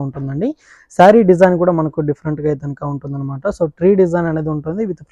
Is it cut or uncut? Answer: uncut